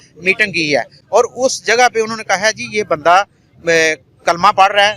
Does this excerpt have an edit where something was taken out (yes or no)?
yes